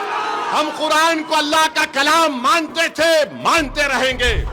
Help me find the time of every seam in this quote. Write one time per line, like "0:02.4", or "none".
none